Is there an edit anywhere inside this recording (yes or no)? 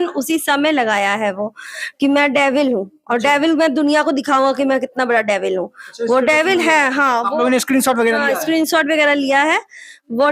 no